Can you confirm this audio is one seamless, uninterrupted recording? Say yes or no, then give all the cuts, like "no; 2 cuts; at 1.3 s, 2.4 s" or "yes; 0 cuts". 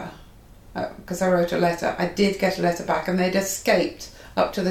yes; 0 cuts